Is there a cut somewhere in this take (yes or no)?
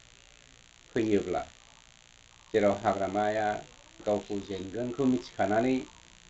no